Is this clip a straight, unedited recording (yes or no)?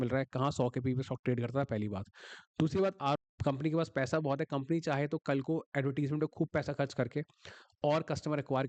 no